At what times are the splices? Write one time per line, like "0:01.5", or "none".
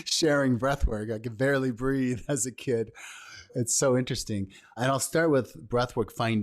0:03.6
0:04.8